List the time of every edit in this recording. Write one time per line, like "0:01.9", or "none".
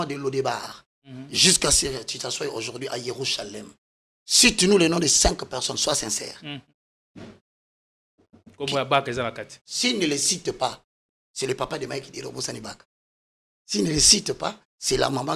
none